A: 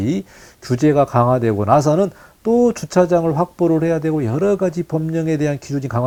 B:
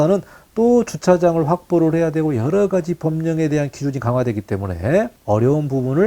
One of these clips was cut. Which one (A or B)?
B